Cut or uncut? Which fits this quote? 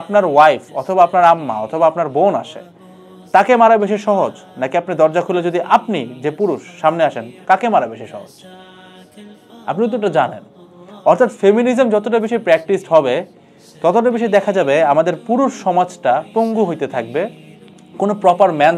uncut